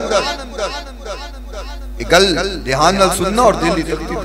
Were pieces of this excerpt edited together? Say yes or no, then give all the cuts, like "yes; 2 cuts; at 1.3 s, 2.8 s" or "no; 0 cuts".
no; 0 cuts